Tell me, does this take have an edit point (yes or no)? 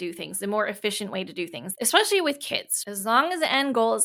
yes